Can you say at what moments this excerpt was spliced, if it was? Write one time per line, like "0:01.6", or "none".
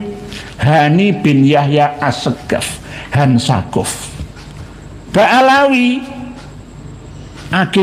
none

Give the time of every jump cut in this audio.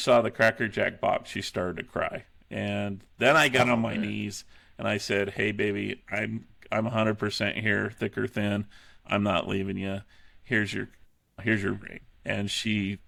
none

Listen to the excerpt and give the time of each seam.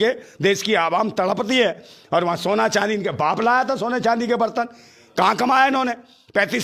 none

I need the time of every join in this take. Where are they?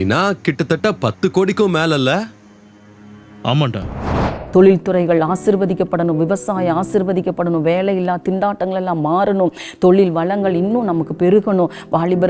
0:04.4

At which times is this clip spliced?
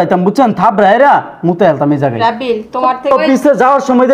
0:03.1

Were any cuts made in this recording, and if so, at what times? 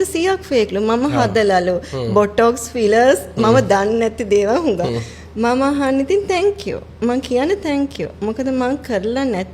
none

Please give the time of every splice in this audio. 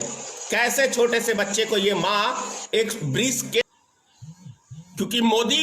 0:03.6

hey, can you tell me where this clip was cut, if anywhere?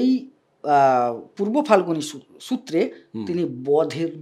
none

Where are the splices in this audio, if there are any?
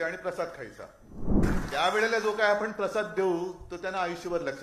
0:01.4

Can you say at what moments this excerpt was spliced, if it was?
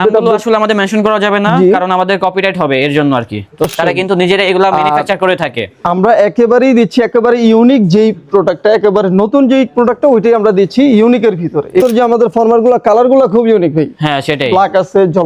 0:03.6
0:11.8

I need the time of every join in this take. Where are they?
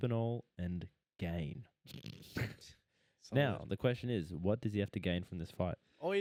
none

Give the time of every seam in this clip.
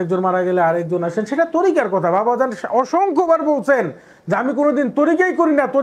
none

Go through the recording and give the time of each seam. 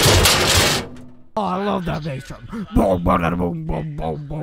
0:01.4

